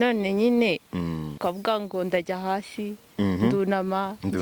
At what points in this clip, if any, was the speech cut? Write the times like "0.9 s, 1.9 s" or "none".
1.4 s

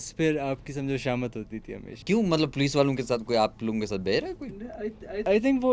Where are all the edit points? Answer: none

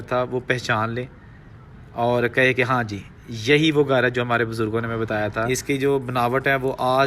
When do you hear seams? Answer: 5.5 s

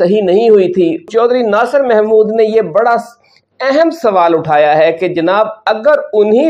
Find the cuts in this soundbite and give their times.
1.1 s

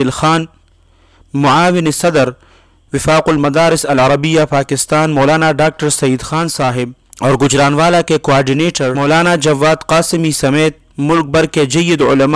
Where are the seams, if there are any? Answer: 7.0 s, 9.0 s

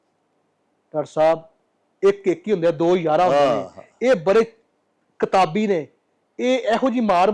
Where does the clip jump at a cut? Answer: none

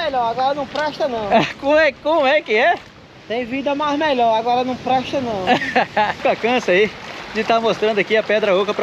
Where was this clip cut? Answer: 6.2 s

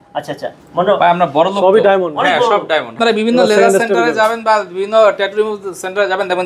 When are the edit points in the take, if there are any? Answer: 2.9 s

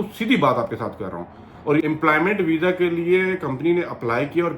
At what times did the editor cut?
1.8 s

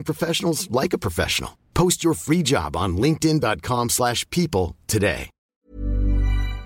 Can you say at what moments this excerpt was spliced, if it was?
5.6 s

